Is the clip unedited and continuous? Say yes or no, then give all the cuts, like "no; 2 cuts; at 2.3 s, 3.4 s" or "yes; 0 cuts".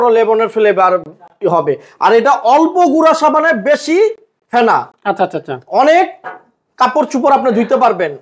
yes; 0 cuts